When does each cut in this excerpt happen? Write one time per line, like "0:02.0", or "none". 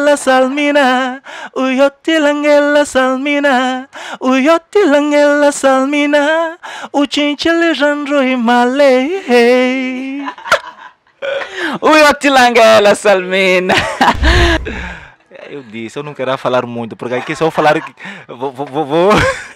0:14.6

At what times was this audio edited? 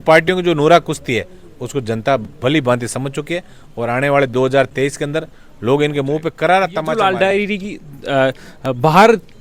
0:06.8

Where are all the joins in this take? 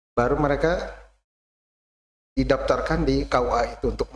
none

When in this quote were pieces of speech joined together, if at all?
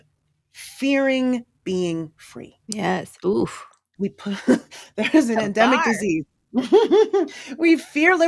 none

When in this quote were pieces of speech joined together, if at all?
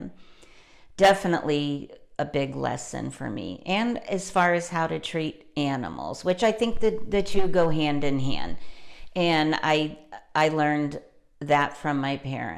none

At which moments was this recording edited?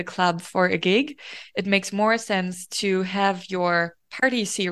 none

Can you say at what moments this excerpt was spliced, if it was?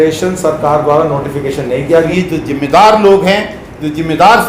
0:02.1

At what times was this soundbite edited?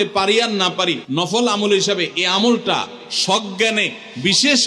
0:01.0

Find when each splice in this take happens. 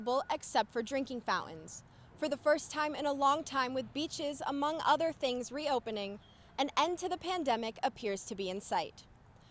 none

